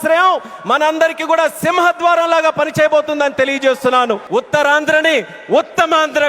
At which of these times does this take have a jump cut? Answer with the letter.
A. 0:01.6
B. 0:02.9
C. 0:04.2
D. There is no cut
C